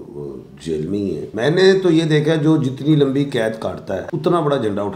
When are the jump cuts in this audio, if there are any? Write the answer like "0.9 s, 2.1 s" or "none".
1.3 s, 4.1 s